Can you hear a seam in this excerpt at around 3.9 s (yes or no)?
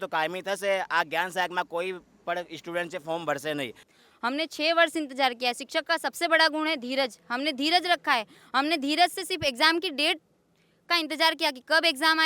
yes